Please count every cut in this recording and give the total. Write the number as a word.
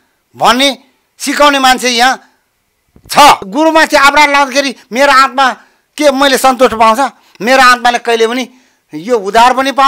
one